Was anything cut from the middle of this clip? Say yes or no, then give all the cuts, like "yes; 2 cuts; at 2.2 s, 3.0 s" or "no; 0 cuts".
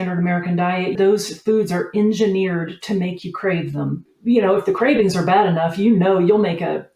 yes; 2 cuts; at 0.9 s, 4.1 s